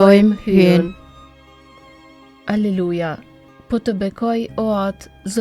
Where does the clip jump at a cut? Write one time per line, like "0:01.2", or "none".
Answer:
0:01.0
0:02.4